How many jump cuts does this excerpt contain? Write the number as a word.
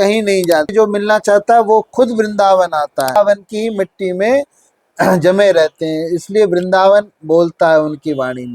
two